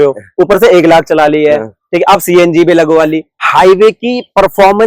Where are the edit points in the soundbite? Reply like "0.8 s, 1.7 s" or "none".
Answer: 3.4 s